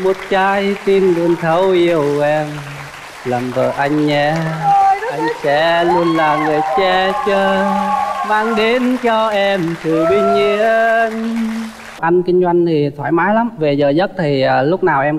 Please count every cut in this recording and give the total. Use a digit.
1